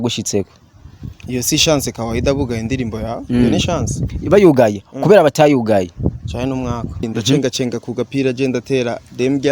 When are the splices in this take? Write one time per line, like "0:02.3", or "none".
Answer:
0:07.0